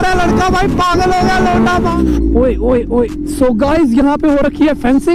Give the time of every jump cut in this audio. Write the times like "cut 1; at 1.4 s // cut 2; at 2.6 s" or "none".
cut 1; at 1.9 s

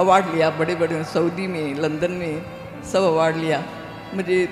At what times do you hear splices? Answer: none

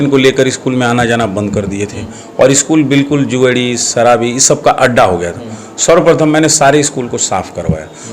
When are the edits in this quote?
none

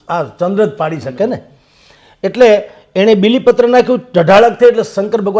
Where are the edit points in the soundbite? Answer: none

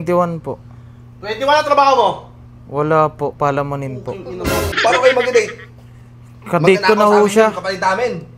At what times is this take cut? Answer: cut 1; at 4.8 s

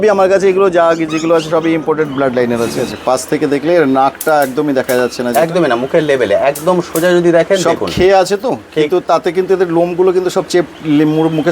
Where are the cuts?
cut 1; at 2.8 s

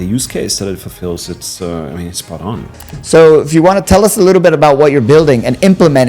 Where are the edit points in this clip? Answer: cut 1; at 2.8 s

